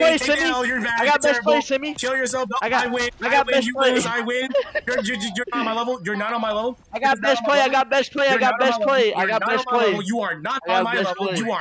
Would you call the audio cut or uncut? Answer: uncut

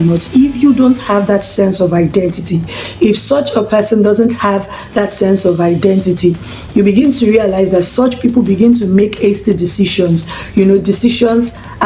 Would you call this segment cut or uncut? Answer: uncut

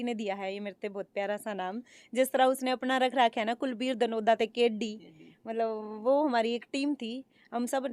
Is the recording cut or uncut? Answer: uncut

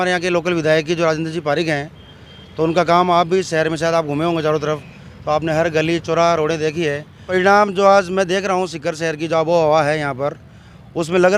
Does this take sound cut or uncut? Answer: cut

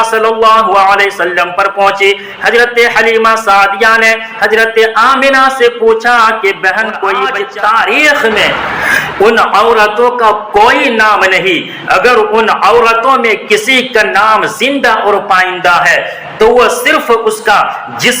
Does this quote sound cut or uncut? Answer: cut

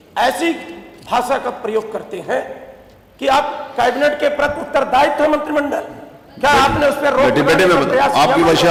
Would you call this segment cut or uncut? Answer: uncut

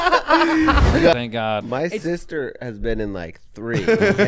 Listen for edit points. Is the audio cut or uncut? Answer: cut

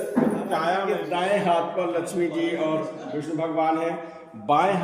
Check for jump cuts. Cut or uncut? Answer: cut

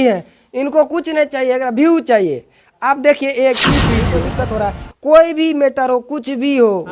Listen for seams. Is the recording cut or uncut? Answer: cut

